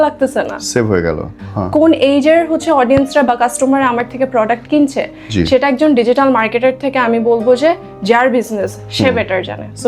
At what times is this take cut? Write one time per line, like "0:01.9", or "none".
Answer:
0:01.4